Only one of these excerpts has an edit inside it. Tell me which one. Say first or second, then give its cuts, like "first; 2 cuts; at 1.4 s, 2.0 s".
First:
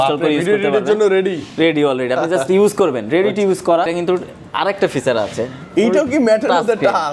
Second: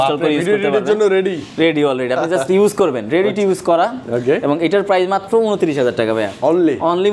first; 1 cut; at 3.9 s